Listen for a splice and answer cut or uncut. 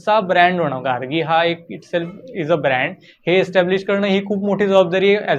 uncut